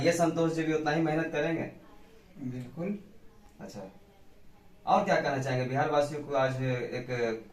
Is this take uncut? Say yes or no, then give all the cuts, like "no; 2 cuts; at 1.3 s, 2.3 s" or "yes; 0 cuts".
yes; 0 cuts